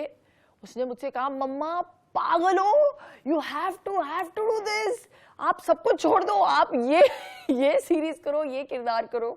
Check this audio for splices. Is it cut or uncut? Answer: uncut